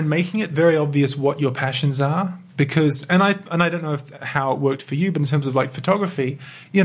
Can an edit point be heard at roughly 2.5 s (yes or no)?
no